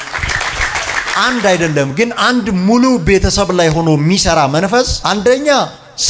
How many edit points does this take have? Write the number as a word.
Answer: two